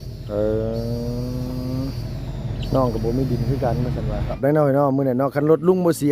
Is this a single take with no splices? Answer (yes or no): no